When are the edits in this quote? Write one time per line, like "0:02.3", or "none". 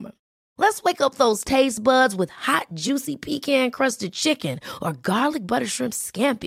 none